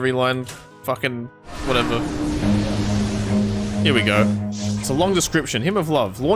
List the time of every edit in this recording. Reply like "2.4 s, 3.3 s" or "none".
4.8 s

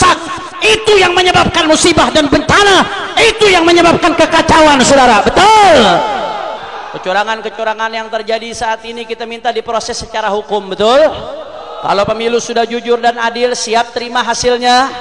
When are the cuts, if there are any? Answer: 6.6 s

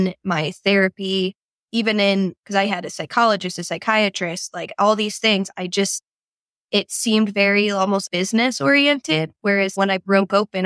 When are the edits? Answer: 9.7 s

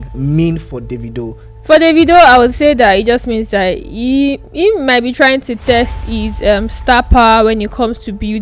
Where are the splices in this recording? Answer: 1.5 s

